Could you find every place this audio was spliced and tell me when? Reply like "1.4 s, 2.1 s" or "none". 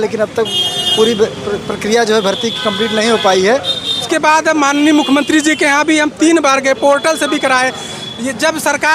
4.0 s

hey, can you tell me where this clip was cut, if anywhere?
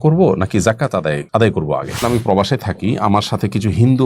1.2 s, 2.0 s

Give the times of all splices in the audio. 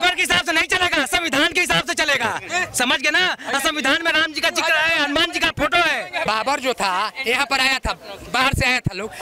6.2 s

